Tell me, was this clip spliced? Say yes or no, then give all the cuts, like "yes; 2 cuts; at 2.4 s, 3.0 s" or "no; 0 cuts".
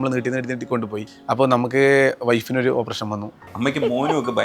yes; 2 cuts; at 1.0 s, 3.5 s